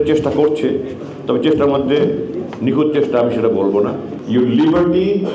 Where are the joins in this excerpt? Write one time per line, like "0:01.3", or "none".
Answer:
0:04.1